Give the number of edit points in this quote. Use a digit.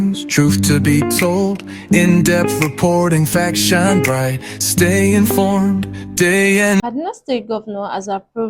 1